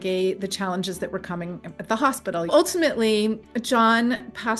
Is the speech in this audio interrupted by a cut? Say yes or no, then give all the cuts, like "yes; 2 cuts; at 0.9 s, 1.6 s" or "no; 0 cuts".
yes; 1 cut; at 2.5 s